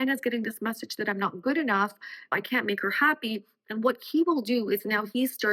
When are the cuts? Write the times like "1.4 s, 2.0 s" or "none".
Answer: none